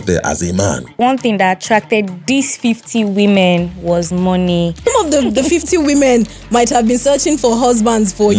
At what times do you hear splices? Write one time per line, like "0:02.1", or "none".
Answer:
0:01.0
0:04.8